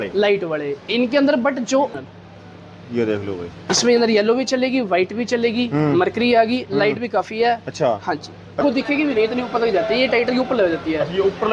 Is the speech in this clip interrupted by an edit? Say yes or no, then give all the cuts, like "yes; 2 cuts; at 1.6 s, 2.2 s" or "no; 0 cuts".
yes; 2 cuts; at 1.9 s, 8.6 s